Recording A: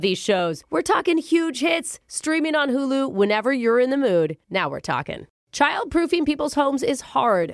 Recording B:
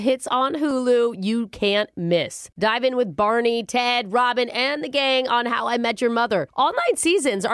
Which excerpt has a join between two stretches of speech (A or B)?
A